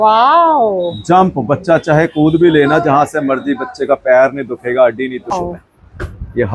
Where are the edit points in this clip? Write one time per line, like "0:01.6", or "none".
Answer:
0:05.3

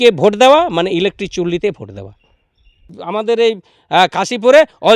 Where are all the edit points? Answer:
0:02.9

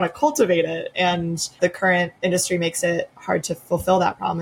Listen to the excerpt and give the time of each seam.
0:01.9
0:03.2

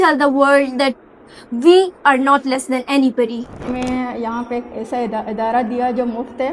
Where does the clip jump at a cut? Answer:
0:03.6

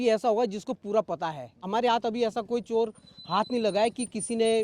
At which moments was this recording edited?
0:01.6

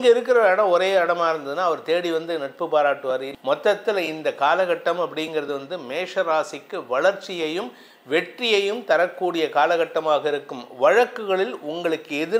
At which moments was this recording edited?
0:03.3

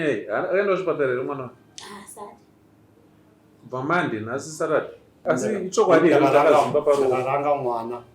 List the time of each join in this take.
0:05.0

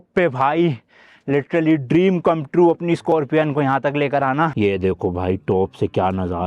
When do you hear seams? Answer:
0:04.5

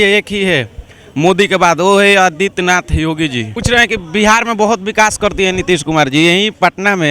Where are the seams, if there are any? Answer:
0:03.5

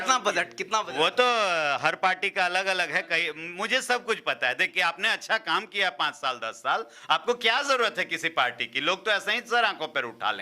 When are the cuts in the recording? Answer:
0:04.7

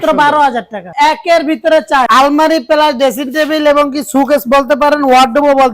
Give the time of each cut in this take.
0:00.9
0:02.1

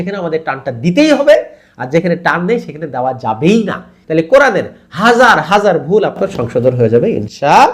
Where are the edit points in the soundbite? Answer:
0:03.9

